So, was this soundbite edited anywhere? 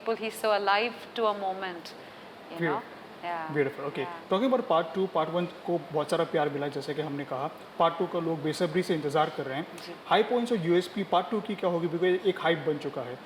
no; 0 cuts

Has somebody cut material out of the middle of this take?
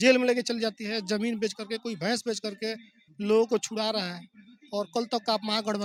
no; 0 cuts

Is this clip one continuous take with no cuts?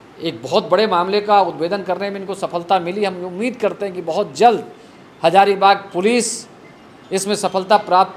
yes; 0 cuts

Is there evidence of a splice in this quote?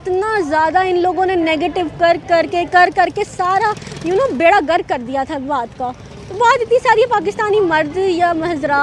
no; 0 cuts

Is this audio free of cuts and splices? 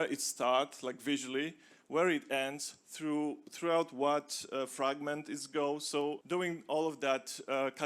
no; 1 cut; at 6.2 s

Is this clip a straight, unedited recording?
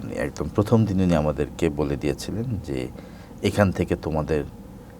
yes; 0 cuts

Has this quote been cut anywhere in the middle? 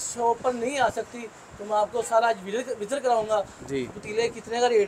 no; 0 cuts

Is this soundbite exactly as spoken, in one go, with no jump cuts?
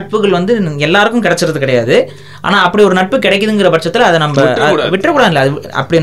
yes; 0 cuts

